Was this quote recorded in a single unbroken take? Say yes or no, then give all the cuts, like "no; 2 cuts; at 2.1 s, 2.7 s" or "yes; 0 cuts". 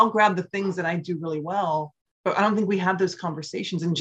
no; 1 cut; at 2.0 s